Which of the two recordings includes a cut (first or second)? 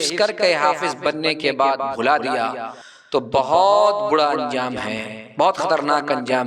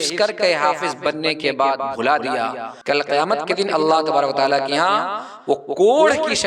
second